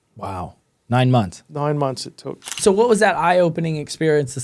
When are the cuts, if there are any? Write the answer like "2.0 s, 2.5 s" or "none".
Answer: 2.6 s

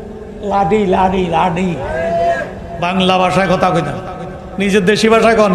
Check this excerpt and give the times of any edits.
none

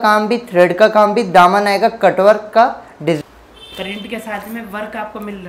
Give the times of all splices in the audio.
3.2 s

